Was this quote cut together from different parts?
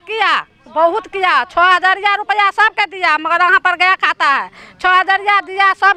no; 0 cuts

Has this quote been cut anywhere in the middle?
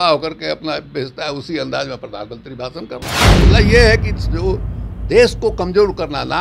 yes; 1 cut; at 3.4 s

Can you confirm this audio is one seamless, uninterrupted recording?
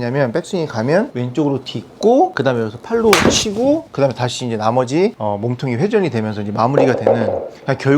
no; 4 cuts; at 1.2 s, 2.4 s, 3.9 s, 5.2 s

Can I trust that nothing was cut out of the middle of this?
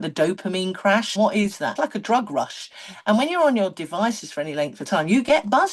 no; 1 cut; at 1.6 s

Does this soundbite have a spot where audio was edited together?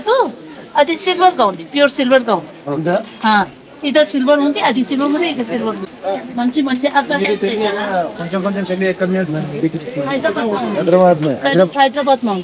yes; 1 cut; at 5.9 s

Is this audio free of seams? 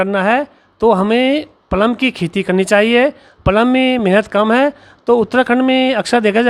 yes; 0 cuts

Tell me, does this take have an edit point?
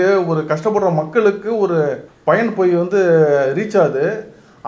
yes; 1 cut; at 2.1 s

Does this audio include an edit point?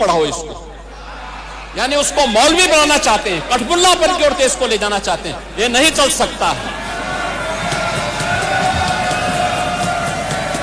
no; 0 cuts

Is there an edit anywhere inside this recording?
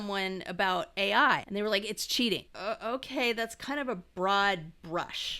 yes; 2 cuts; at 1.5 s, 2.5 s

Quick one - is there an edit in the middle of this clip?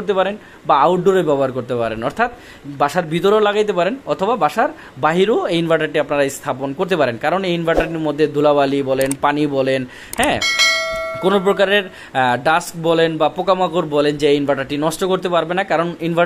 no; 0 cuts

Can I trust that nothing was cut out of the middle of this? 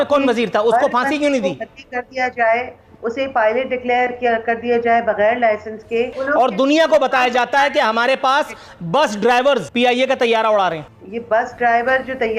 no; 2 cuts; at 6.2 s, 9.7 s

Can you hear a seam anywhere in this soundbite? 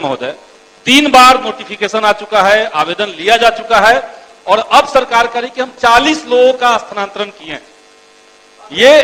no; 0 cuts

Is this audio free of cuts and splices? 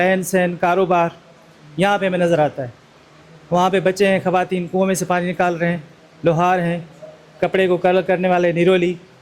yes; 0 cuts

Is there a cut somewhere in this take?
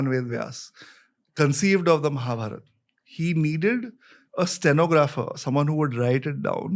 no; 0 cuts

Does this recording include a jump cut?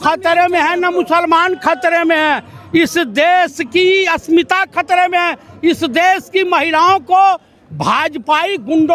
no; 0 cuts

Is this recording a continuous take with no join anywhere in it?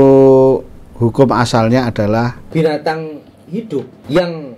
no; 1 cut; at 2.4 s

